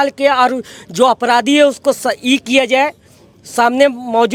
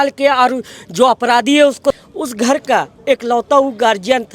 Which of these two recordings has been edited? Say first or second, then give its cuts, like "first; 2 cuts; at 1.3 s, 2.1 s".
second; 1 cut; at 2.0 s